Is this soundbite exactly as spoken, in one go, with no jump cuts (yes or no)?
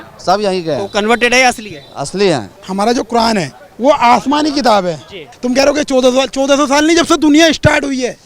no